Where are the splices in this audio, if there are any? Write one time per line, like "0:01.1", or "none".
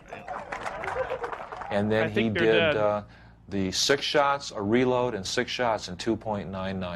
0:01.4